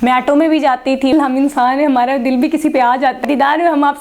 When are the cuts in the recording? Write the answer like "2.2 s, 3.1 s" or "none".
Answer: 1.1 s, 3.2 s